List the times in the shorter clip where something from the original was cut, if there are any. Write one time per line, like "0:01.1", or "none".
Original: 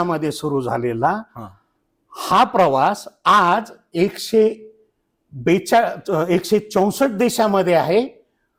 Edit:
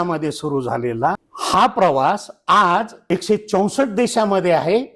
0:01.3
0:03.1